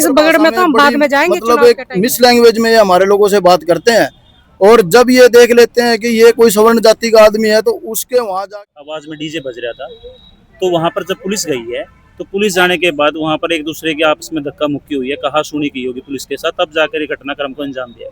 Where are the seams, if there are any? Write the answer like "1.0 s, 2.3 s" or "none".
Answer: 1.3 s, 8.5 s